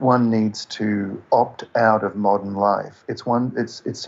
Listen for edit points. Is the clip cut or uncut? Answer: uncut